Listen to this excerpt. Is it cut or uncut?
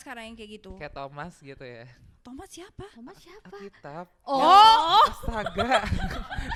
uncut